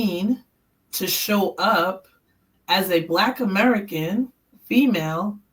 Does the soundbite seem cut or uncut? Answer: uncut